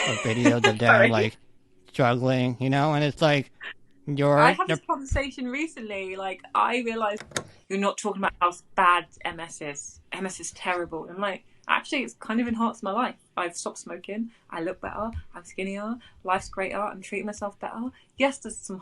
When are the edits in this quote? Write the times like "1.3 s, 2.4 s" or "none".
7.3 s